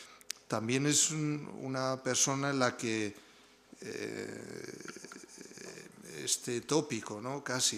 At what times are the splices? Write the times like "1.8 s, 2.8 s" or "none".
none

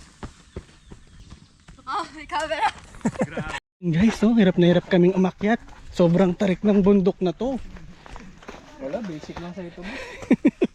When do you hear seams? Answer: 1.1 s, 3.6 s

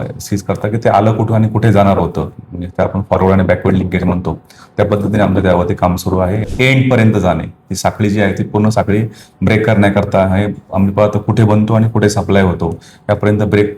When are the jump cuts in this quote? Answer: 6.5 s

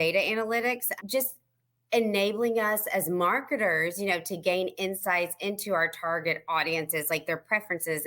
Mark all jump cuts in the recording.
0.9 s

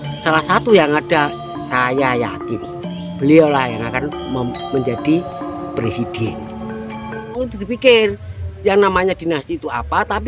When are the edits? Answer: 7.4 s

